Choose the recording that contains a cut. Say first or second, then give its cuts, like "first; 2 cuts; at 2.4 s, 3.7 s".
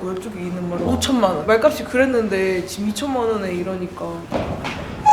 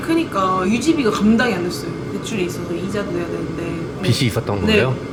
first; 2 cuts; at 1.4 s, 4.1 s